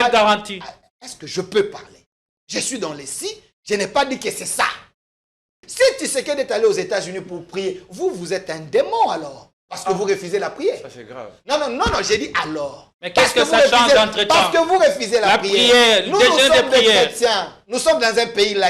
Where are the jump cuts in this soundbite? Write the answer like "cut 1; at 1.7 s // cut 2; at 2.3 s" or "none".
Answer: cut 1; at 5.6 s